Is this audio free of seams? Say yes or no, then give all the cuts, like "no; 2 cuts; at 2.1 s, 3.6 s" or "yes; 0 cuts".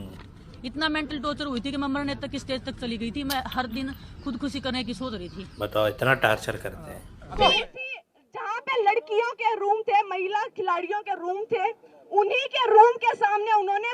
no; 1 cut; at 7.4 s